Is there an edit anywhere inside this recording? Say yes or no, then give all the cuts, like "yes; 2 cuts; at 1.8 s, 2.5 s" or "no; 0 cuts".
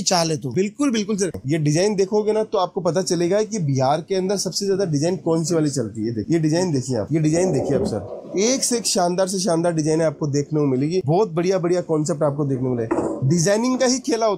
no; 0 cuts